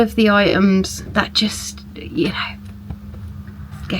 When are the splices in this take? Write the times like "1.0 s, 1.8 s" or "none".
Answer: 1.0 s